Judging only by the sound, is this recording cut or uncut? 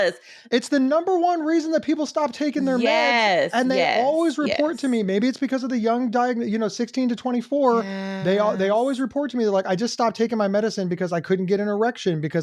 uncut